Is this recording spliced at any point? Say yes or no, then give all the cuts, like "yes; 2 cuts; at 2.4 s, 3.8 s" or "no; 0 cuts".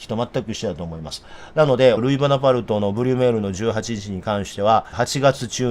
yes; 2 cuts; at 2.0 s, 4.9 s